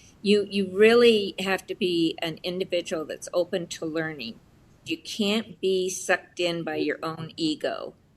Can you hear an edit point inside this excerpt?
yes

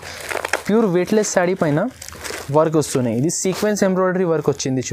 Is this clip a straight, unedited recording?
yes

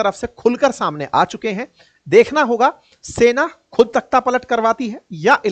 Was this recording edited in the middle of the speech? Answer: no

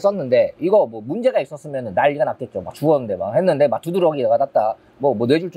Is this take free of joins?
yes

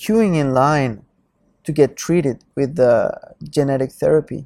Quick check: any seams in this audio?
no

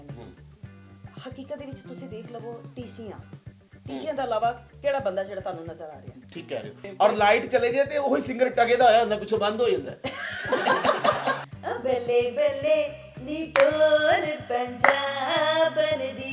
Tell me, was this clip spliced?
yes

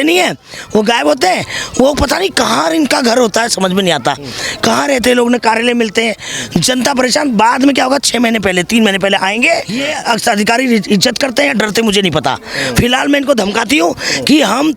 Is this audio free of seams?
no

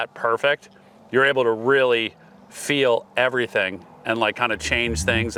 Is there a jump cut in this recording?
no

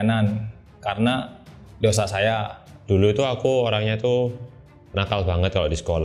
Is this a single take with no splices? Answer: no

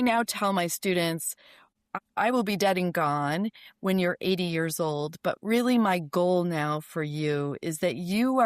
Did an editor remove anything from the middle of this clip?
yes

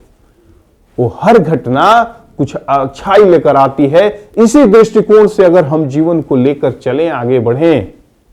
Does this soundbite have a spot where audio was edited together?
no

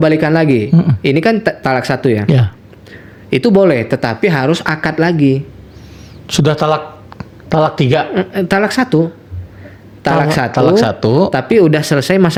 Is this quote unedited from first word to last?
yes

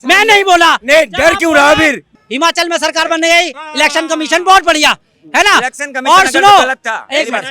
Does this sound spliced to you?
yes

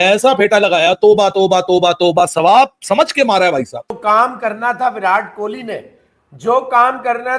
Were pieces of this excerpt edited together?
yes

